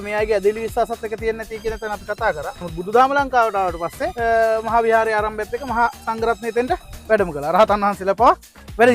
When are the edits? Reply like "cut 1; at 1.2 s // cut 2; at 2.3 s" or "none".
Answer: cut 1; at 2.6 s // cut 2; at 4.1 s